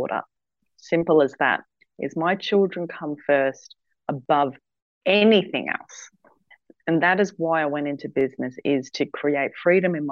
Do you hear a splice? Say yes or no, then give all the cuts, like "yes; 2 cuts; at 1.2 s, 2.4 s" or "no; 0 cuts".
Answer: no; 0 cuts